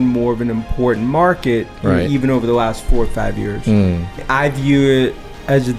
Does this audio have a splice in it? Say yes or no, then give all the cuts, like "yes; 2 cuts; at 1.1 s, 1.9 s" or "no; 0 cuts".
yes; 1 cut; at 4.2 s